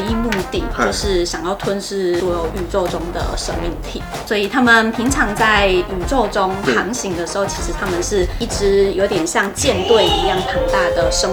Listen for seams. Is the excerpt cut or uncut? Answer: uncut